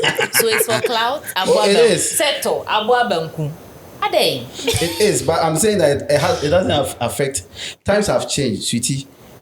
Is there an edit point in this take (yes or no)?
no